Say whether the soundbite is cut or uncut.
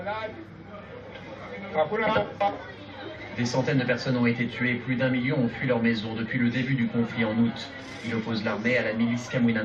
uncut